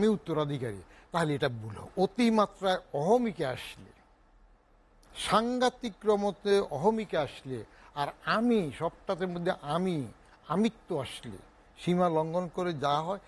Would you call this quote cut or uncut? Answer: cut